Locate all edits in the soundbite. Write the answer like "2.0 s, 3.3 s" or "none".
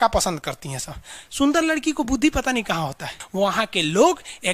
3.2 s